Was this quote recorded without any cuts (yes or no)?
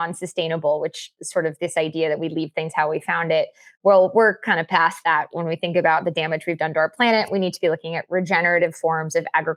yes